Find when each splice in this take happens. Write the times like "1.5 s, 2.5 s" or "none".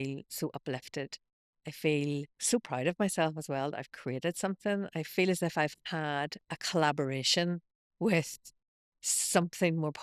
2.4 s